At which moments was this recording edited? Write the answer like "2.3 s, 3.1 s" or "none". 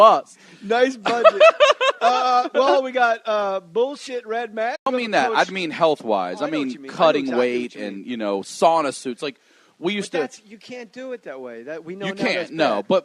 none